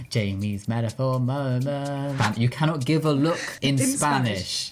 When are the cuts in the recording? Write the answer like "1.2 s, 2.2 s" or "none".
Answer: 2.2 s